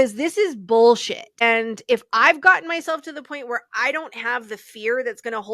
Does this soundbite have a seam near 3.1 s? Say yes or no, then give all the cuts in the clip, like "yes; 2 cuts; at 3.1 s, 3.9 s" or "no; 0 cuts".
no; 1 cut; at 1.4 s